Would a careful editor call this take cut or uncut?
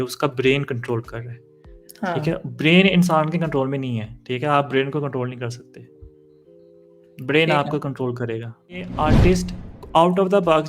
cut